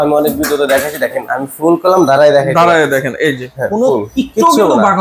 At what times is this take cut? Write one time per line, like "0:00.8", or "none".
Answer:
none